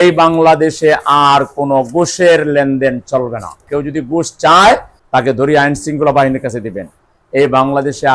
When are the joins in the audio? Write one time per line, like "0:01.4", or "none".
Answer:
0:03.6